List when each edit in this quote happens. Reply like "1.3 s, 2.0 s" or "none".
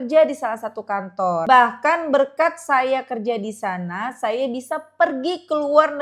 1.4 s